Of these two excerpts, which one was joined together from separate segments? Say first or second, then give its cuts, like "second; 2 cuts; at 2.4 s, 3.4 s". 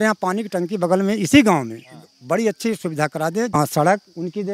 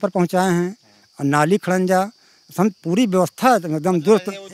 first; 1 cut; at 3.6 s